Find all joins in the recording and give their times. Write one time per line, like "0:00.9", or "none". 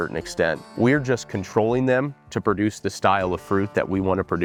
none